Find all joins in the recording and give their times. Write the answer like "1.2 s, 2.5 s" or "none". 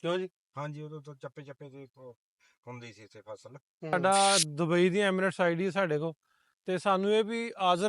3.9 s